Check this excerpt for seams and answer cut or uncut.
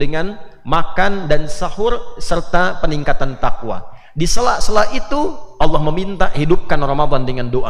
uncut